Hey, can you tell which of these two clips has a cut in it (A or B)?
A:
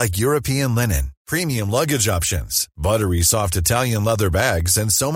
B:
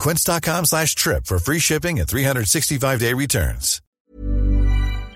B